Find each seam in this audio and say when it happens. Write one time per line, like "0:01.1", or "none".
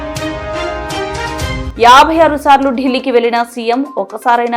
0:01.6